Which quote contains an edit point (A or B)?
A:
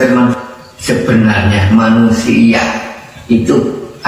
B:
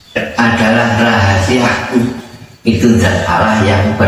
A